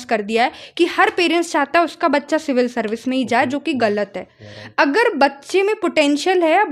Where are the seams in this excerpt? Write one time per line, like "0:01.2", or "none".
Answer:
none